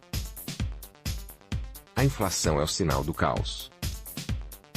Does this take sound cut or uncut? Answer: cut